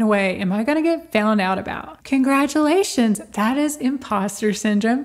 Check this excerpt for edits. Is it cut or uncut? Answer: uncut